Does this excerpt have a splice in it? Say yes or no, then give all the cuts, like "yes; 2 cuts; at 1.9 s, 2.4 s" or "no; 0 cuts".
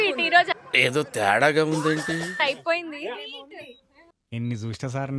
yes; 1 cut; at 4.2 s